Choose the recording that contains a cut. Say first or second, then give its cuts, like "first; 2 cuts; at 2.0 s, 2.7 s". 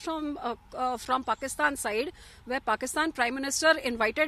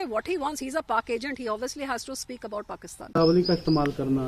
second; 1 cut; at 3.2 s